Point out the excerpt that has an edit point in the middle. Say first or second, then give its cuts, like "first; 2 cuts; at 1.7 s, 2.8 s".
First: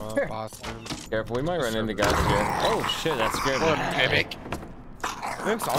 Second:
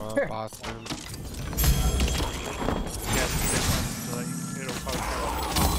first; 1 cut; at 1.0 s